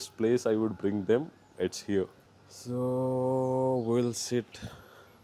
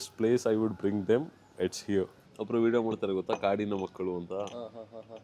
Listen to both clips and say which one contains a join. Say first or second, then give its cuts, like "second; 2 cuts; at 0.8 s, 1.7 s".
second; 1 cut; at 2.3 s